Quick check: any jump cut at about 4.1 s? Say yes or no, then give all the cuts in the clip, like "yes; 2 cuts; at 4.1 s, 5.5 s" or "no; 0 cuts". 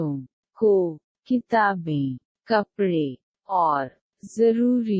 no; 1 cut; at 1.1 s